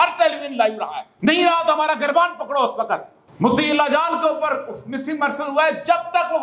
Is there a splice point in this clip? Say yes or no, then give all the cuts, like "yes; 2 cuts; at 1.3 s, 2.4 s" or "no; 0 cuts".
yes; 2 cuts; at 1.0 s, 3.2 s